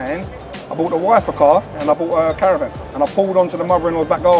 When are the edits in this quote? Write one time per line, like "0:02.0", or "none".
0:01.7
0:02.8